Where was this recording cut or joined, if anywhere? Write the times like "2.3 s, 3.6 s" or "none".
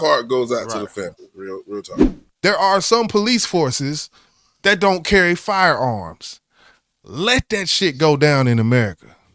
2.2 s